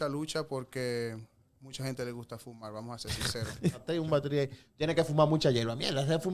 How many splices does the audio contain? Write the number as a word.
one